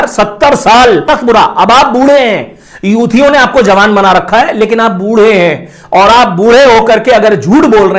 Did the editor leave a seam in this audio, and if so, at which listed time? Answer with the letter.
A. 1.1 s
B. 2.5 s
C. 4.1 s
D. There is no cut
A